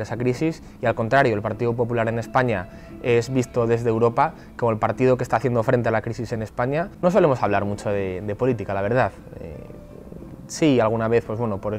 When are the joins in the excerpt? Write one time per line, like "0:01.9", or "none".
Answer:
0:06.9